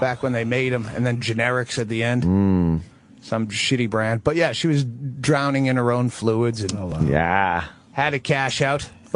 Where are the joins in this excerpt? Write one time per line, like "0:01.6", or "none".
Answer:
0:04.4